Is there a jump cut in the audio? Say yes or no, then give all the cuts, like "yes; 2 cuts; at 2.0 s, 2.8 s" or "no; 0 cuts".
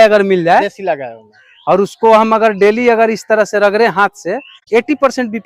yes; 1 cut; at 4.5 s